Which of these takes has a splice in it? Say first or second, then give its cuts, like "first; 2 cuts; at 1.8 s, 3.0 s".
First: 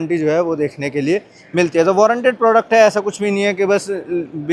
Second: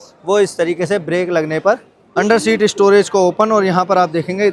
second; 1 cut; at 1.9 s